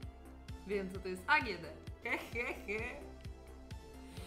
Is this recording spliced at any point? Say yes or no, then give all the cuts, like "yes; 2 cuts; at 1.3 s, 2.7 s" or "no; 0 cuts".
yes; 1 cut; at 1.9 s